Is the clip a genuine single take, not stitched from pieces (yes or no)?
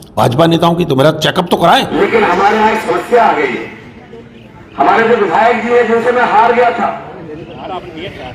no